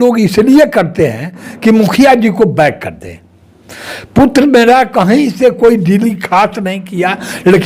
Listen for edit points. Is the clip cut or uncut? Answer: uncut